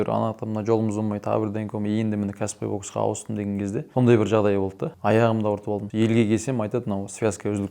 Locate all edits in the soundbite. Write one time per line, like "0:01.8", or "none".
0:03.9
0:04.9
0:05.9